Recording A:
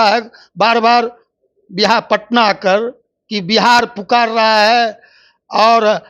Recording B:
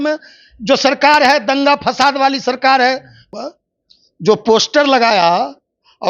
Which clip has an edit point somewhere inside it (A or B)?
B